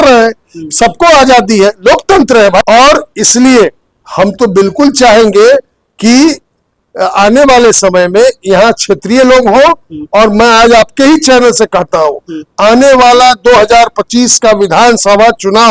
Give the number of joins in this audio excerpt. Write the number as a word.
one